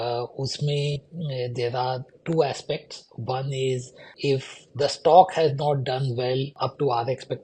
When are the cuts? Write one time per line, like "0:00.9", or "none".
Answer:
0:04.1
0:06.5